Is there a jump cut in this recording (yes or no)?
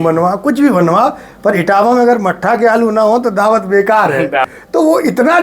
yes